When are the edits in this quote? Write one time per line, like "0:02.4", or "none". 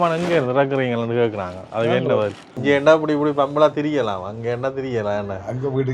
0:02.5